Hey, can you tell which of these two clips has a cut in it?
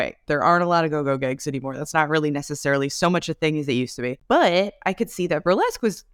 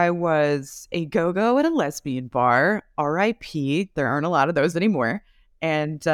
first; 1 cut; at 4.2 s

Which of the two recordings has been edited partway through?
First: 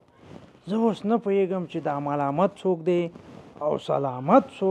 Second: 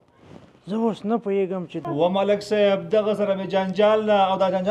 second; 1 cut; at 1.8 s

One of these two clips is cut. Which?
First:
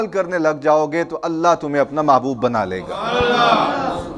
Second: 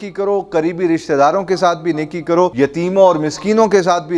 second; 1 cut; at 2.5 s

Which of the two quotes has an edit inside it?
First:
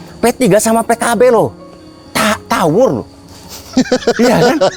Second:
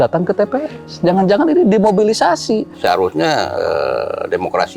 second; 1 cut; at 2.7 s

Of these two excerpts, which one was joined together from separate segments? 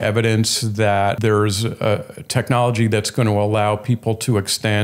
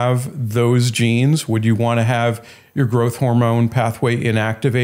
first; 1 cut; at 1.2 s

